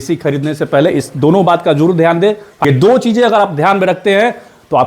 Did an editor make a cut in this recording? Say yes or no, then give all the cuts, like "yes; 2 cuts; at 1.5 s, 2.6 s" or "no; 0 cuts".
yes; 1 cut; at 2.5 s